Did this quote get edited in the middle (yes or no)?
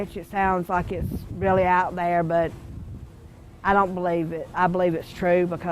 yes